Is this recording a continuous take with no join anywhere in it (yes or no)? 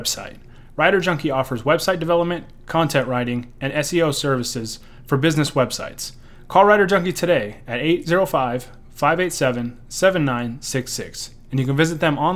yes